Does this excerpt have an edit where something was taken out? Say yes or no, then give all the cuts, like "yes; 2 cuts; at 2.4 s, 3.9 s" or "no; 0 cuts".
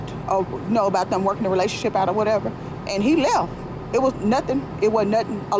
no; 0 cuts